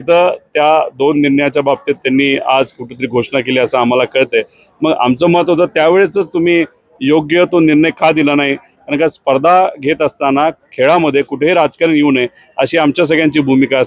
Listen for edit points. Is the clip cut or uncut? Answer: uncut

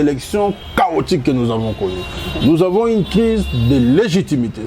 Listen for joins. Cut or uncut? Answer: uncut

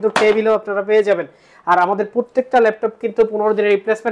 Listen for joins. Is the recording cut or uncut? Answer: uncut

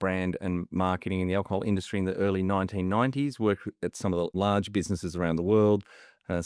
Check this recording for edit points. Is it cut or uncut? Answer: cut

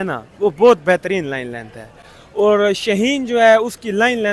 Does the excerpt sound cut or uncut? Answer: uncut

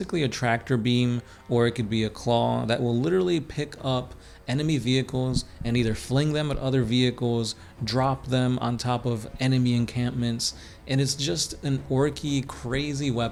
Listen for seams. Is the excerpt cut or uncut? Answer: uncut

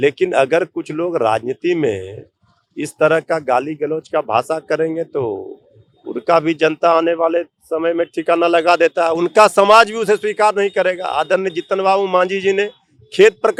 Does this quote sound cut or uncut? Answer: uncut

